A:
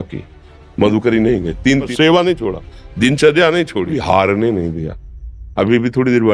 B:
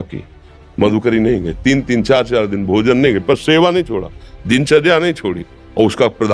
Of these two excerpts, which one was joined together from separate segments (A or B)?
A